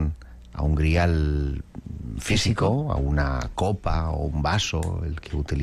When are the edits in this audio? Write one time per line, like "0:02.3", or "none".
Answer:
0:02.4